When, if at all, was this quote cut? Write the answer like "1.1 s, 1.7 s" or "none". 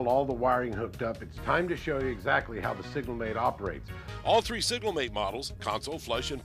none